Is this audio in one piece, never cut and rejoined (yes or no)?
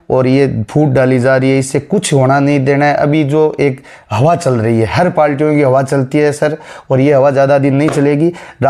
yes